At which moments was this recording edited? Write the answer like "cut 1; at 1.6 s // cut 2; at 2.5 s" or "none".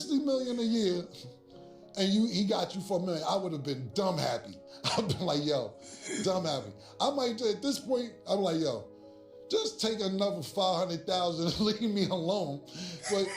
none